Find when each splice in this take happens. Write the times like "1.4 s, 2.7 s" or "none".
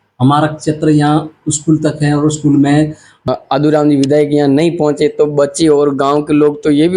3.3 s

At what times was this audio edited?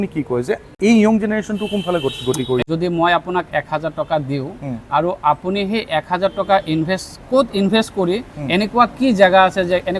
2.6 s

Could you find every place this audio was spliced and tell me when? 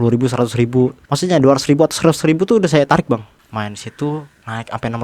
1.1 s, 3.3 s

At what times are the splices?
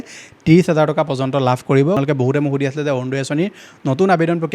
2.0 s

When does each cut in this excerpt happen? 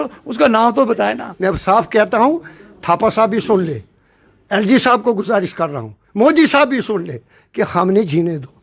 1.3 s

